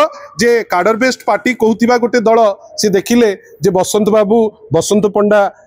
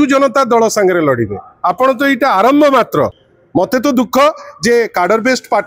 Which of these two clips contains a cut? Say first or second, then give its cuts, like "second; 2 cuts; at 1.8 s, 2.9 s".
second; 1 cut; at 3.2 s